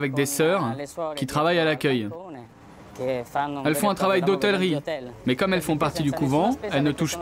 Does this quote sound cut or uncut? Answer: uncut